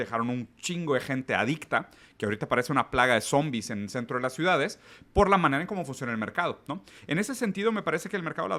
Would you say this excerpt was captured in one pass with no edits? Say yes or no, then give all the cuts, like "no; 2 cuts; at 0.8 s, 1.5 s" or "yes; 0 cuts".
yes; 0 cuts